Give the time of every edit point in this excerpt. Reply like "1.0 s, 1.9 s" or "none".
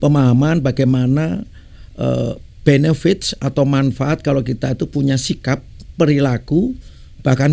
none

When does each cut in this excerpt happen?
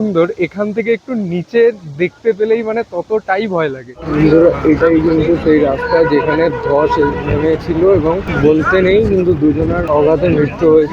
3.9 s, 8.3 s, 9.8 s

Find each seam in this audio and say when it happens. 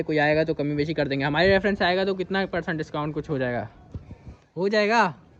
none

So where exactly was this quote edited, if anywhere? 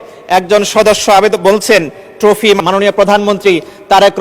2.6 s

